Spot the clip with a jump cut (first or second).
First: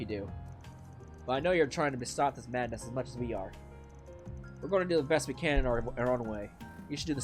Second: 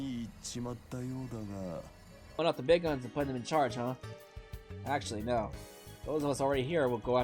second